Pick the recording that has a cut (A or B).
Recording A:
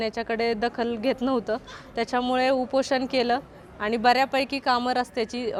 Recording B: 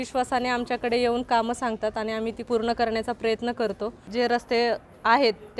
B